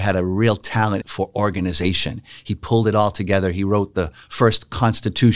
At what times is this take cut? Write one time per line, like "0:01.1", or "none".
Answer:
0:01.1